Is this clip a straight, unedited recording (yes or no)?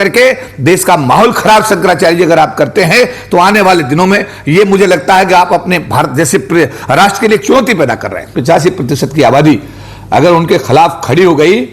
no